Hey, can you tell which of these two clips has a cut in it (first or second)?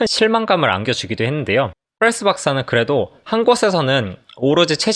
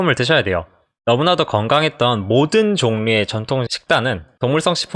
first